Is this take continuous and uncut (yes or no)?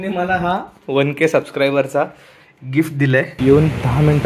no